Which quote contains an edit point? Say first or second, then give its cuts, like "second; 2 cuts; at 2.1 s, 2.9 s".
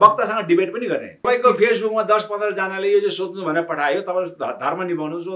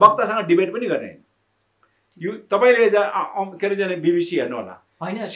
first; 1 cut; at 1.2 s